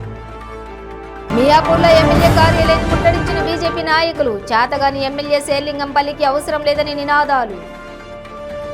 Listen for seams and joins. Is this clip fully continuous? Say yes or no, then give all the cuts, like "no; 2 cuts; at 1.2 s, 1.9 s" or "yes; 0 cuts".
yes; 0 cuts